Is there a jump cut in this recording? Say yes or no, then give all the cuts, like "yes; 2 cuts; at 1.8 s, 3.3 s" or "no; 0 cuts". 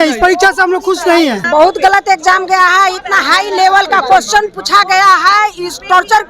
yes; 1 cut; at 1.4 s